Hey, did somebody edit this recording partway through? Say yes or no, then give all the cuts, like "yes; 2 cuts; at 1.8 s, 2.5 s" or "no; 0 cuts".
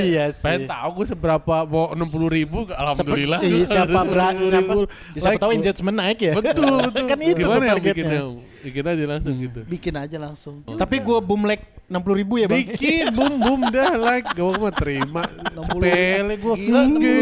yes; 1 cut; at 10.7 s